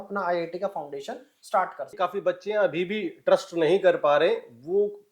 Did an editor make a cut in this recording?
yes; 1 cut; at 1.9 s

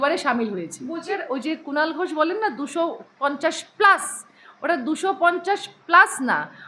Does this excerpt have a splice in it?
yes; 1 cut; at 1.2 s

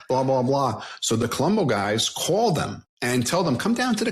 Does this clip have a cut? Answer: yes; 1 cut; at 2.8 s

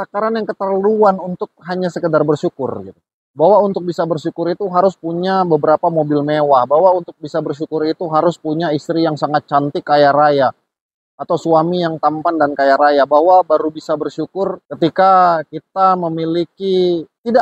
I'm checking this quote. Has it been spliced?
no; 0 cuts

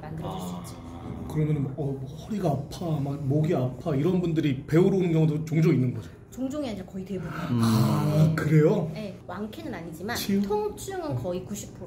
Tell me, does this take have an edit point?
no; 0 cuts

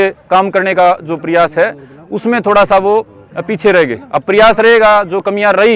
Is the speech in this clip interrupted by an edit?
no; 0 cuts

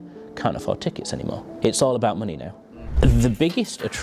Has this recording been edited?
yes; 2 cuts; at 1.5 s, 2.8 s

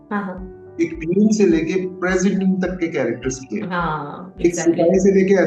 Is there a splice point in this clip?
no; 0 cuts

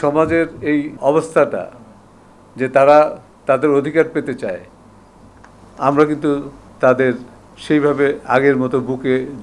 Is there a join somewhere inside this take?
yes; 1 cut; at 0.9 s

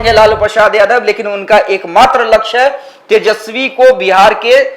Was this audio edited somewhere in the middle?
no; 0 cuts

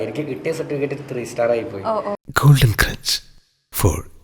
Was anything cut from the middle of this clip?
yes; 1 cut; at 2.2 s

